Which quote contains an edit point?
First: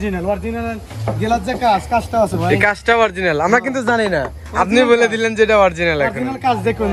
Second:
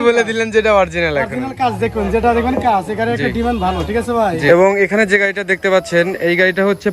second; 1 cut; at 4.4 s

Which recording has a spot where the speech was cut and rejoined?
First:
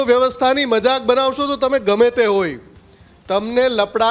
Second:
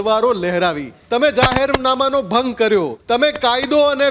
second; 2 cuts; at 0.9 s, 3.0 s

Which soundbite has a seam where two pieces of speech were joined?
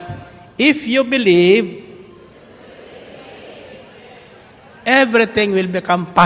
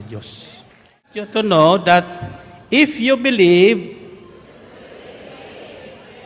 second; 1 cut; at 1.2 s

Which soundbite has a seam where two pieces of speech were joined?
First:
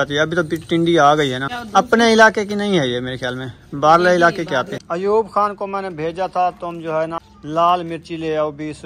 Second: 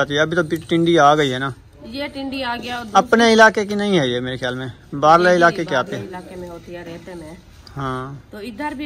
first; 3 cuts; at 1.5 s, 4.8 s, 7.3 s

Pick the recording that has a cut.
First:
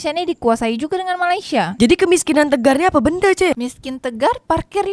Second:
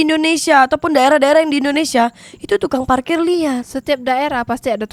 first; 1 cut; at 3.5 s

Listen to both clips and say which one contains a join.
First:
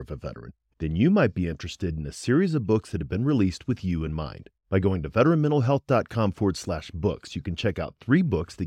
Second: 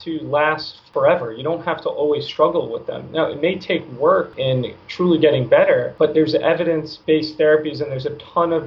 second; 4 cuts; at 0.8 s, 4.3 s, 5.9 s, 6.9 s

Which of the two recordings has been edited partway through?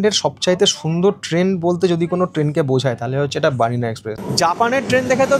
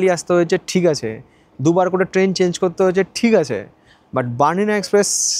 first; 1 cut; at 4.1 s

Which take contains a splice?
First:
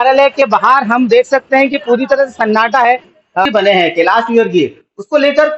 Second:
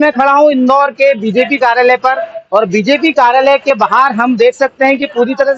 first; 1 cut; at 3.5 s

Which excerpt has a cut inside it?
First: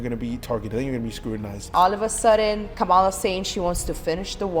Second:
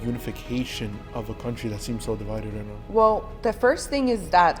first; 2 cuts; at 1.7 s, 2.7 s

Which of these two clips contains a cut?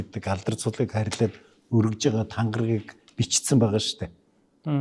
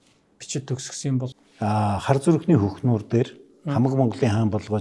second; 1 cut; at 1.3 s

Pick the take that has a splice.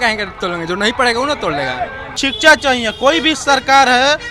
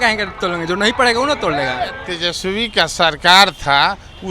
second; 1 cut; at 2.1 s

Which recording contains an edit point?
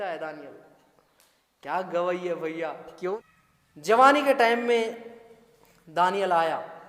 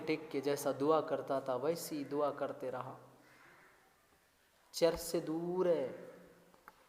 first; 1 cut; at 3.1 s

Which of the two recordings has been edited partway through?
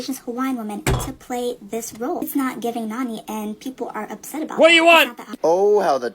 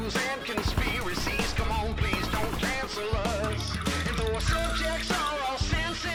first; 1 cut; at 5.2 s

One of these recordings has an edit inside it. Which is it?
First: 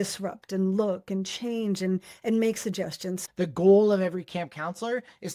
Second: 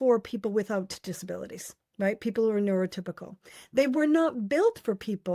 first; 1 cut; at 3.2 s

